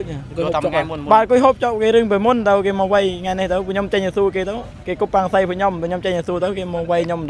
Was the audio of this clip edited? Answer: no; 0 cuts

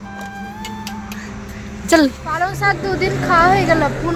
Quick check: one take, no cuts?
no; 1 cut; at 2.4 s

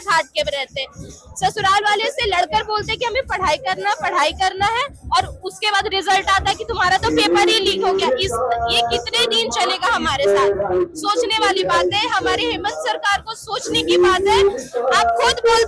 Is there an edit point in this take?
no; 0 cuts

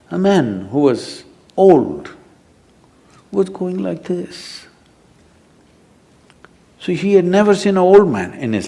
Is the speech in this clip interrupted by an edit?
no; 0 cuts

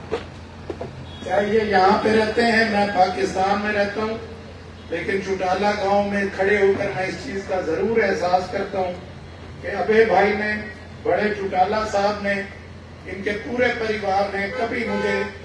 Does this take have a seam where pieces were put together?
no; 0 cuts

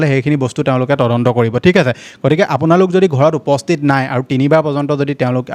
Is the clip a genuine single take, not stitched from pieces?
yes; 0 cuts

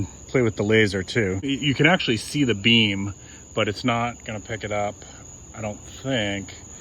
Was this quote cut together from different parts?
yes; 1 cut; at 1.5 s

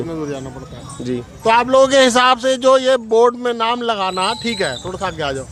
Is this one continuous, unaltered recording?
yes; 0 cuts

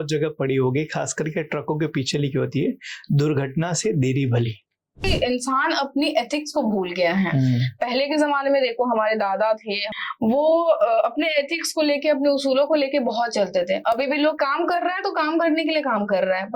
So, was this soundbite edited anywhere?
yes; 3 cuts; at 5.1 s, 9.9 s, 14.4 s

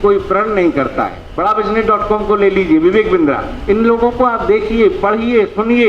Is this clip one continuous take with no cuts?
no; 1 cut; at 1.2 s

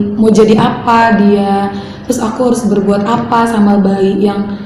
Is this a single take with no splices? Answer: yes; 0 cuts

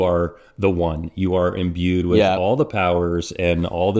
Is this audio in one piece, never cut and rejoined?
yes; 0 cuts

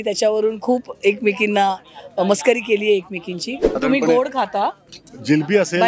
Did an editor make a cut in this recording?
yes; 1 cut; at 3.8 s

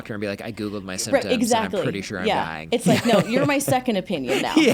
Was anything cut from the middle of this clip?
no; 0 cuts

